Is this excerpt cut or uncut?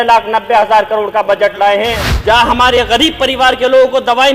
cut